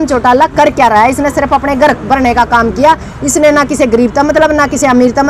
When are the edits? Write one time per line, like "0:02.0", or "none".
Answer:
none